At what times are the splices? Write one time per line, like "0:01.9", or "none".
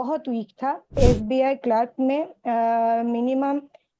0:01.0

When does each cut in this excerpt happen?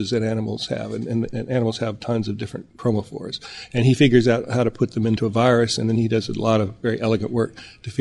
0:02.6
0:05.2

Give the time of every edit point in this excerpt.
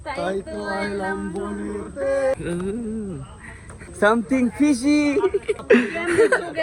0:02.3
0:03.8
0:05.6

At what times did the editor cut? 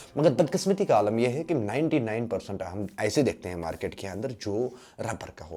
none

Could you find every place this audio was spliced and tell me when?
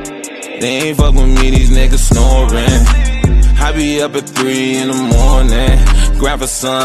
none

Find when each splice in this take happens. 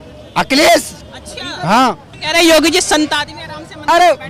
0:02.2

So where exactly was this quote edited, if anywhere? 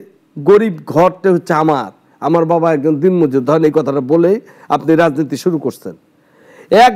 none

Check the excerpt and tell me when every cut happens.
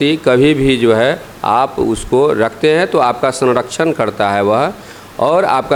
none

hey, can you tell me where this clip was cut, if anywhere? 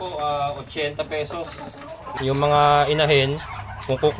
0:02.0

